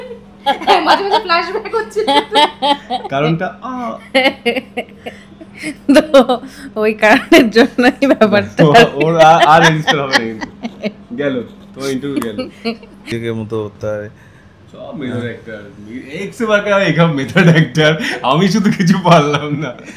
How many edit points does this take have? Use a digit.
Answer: 1